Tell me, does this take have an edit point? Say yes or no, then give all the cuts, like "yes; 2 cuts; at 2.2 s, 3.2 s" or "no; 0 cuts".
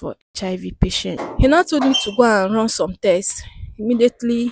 yes; 1 cut; at 1.2 s